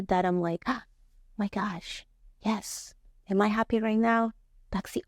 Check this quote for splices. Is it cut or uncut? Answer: uncut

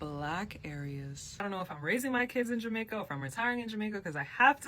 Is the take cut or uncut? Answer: cut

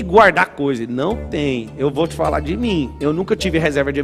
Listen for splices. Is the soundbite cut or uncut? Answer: cut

